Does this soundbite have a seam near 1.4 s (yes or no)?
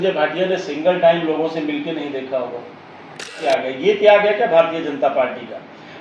no